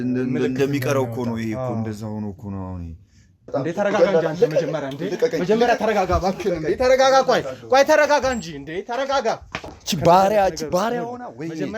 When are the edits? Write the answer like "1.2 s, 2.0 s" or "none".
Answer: 3.5 s, 9.8 s